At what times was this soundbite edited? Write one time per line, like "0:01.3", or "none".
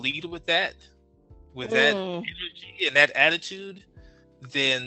none